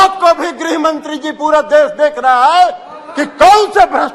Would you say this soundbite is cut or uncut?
uncut